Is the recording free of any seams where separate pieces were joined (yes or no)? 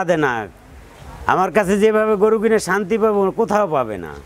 yes